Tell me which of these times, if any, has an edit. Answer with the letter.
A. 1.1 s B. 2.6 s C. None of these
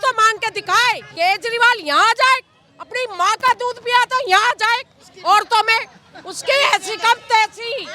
A